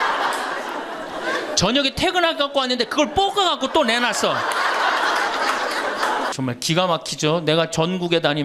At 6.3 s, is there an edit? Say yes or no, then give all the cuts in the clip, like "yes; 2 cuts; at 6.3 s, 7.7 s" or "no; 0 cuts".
yes; 1 cut; at 6.3 s